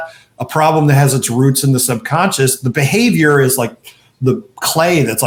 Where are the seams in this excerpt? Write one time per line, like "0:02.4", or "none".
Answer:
none